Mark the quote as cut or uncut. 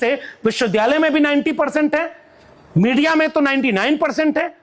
uncut